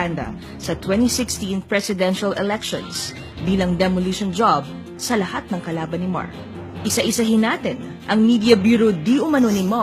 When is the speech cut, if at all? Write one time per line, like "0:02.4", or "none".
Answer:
0:05.6

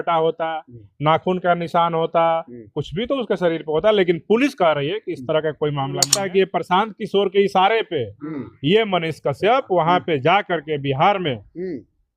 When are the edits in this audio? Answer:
0:06.1

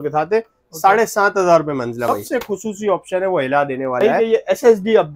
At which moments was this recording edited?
0:02.1
0:04.0

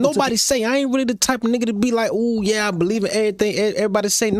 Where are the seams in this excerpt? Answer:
none

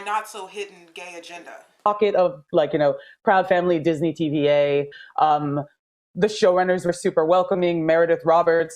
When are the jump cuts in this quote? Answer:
0:01.9

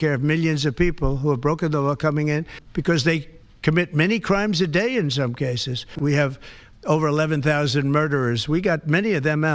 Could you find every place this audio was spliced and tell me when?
0:02.6
0:06.0

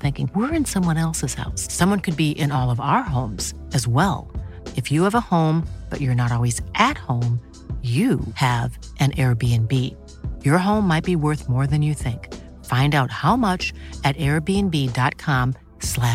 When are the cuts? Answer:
none

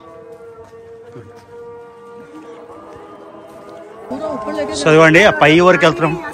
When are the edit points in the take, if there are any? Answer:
none

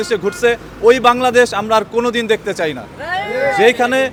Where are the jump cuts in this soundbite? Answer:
none

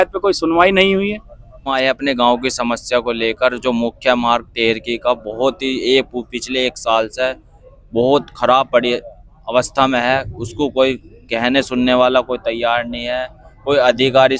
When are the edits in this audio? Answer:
0:01.7

